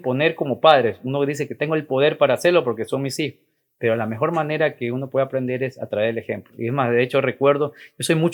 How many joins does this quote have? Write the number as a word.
zero